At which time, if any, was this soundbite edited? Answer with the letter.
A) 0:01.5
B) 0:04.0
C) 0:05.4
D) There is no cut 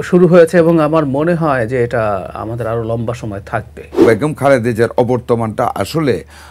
B